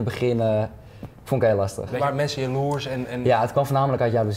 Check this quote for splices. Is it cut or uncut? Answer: uncut